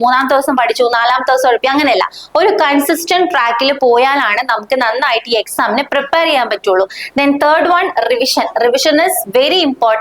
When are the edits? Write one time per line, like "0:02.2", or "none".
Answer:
none